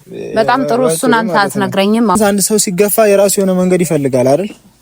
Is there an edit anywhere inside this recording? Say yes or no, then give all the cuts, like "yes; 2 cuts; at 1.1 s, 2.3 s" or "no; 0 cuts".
yes; 1 cut; at 2.2 s